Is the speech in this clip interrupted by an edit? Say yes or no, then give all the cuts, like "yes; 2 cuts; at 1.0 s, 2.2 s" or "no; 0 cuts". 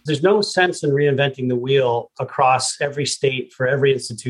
no; 0 cuts